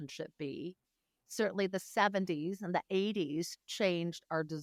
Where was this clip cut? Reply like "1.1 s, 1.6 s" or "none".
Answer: none